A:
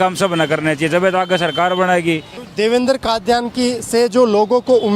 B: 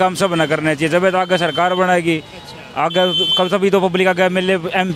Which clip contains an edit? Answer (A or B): A